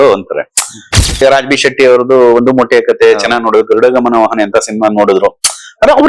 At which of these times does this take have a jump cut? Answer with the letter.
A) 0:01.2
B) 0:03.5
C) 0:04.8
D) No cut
A